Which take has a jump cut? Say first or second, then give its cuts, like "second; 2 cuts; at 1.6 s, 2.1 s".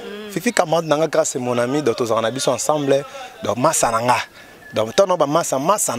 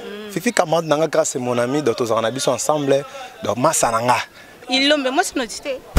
second; 1 cut; at 4.6 s